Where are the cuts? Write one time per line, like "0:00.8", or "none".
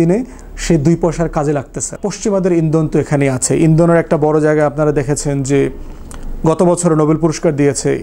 0:02.0

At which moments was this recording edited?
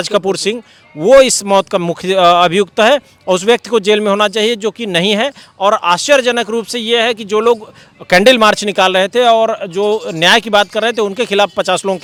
none

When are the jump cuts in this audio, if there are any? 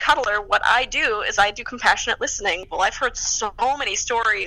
0:02.6

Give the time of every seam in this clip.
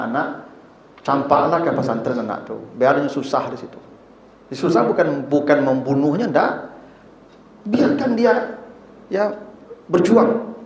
none

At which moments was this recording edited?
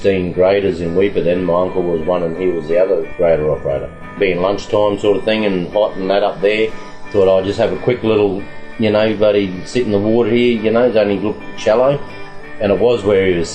0:03.1
0:04.1

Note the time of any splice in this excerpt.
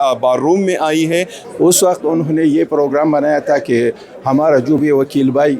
0:01.4

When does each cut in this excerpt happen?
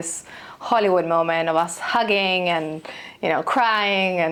none

